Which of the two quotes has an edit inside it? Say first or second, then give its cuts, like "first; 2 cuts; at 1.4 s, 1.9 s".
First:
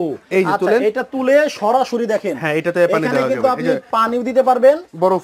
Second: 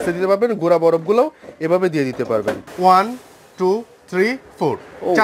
second; 1 cut; at 2.7 s